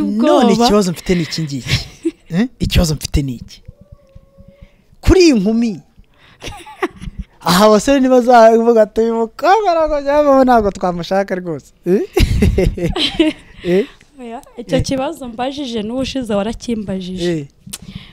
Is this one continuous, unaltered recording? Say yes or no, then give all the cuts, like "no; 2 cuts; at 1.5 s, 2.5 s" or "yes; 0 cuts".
yes; 0 cuts